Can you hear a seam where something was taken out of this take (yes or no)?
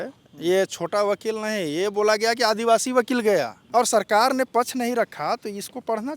yes